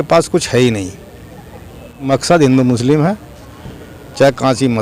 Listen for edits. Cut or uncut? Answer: cut